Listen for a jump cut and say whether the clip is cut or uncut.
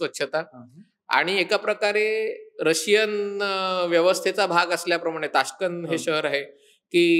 uncut